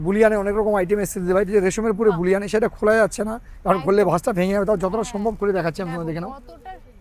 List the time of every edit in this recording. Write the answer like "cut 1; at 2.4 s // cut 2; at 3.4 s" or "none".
none